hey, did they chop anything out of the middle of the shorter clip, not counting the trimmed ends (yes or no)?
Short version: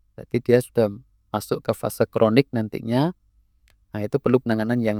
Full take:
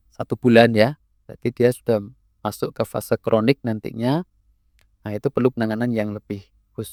no